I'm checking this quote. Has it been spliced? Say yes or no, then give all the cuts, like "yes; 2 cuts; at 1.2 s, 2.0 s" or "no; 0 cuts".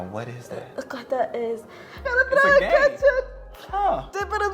yes; 1 cut; at 2.0 s